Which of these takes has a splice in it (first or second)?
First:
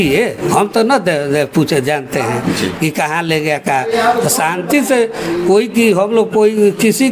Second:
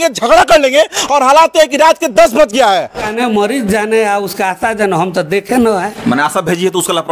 second